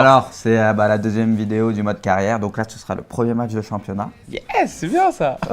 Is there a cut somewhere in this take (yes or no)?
yes